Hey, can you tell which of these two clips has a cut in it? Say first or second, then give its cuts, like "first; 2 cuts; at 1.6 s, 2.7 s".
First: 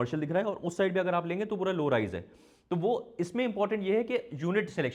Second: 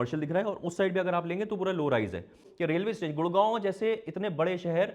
second; 1 cut; at 2.5 s